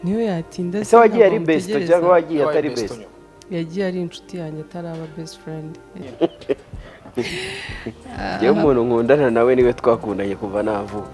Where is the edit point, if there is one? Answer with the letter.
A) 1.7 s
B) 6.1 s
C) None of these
B